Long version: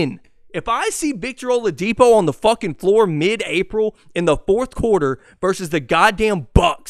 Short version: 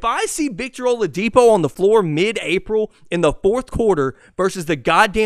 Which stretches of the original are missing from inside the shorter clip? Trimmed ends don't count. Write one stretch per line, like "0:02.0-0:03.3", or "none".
0:02.4-0:02.8